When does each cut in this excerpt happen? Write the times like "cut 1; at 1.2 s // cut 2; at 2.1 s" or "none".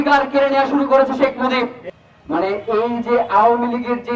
cut 1; at 1.9 s